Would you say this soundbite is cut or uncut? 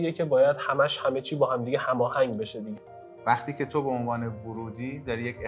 cut